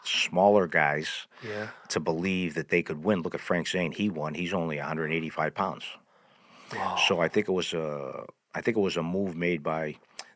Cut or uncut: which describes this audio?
uncut